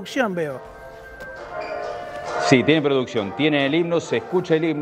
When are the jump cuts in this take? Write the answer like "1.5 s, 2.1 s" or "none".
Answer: none